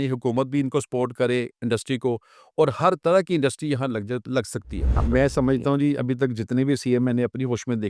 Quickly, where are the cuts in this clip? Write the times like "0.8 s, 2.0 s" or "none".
4.9 s